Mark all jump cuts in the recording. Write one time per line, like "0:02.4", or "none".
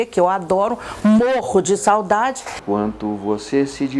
0:02.5